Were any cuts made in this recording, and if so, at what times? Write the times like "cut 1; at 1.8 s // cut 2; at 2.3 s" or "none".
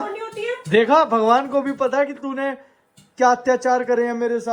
none